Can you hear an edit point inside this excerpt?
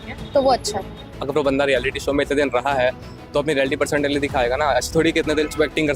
yes; 1 cut; at 1.2 s

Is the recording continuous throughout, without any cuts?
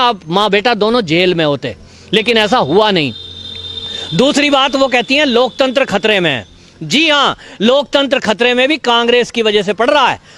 yes; 0 cuts

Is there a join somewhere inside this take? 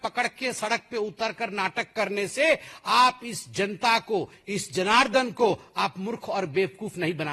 no; 0 cuts

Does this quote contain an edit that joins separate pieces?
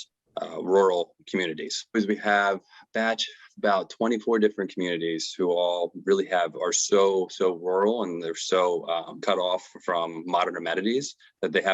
yes; 2 cuts; at 1.9 s, 9.2 s

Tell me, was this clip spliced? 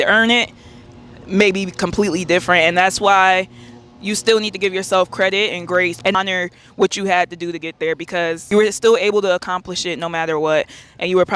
no; 0 cuts

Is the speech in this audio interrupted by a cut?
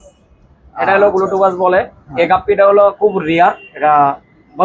no; 0 cuts

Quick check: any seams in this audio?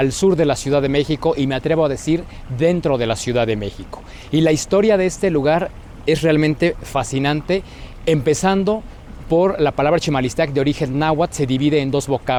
no; 0 cuts

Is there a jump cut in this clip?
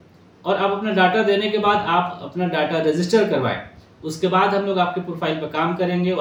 no; 0 cuts

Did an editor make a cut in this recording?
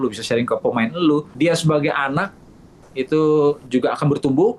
yes; 1 cut; at 1.3 s

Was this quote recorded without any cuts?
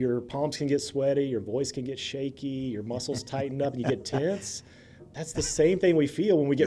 yes; 0 cuts

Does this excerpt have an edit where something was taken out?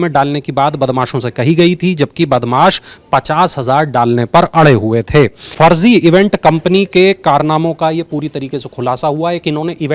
yes; 1 cut; at 5.4 s

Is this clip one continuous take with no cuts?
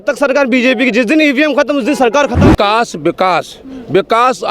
no; 1 cut; at 2.4 s

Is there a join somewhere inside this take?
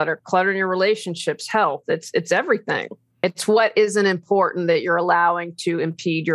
yes; 1 cut; at 3.0 s

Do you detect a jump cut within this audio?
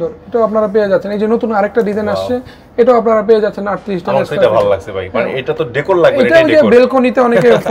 no; 0 cuts

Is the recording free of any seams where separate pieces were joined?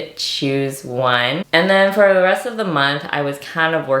no; 1 cut; at 1.4 s

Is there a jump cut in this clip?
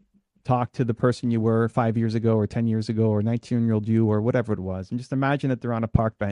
no; 0 cuts

